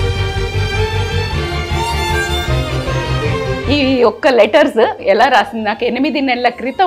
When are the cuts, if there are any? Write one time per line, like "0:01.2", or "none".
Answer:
0:03.4
0:05.0